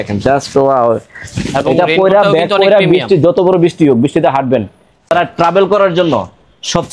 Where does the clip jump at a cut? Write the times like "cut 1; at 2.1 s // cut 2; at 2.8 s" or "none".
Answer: cut 1; at 5.1 s